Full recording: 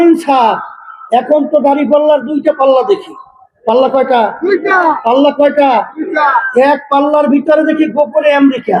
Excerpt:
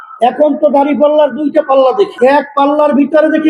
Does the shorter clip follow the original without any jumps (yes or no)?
no